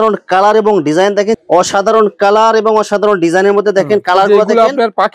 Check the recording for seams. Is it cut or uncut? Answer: cut